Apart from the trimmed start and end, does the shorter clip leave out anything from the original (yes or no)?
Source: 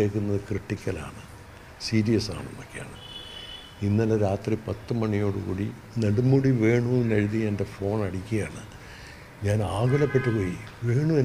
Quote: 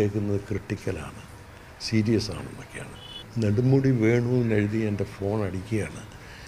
yes